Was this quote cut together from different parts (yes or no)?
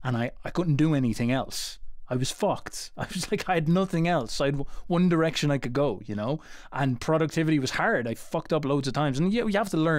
no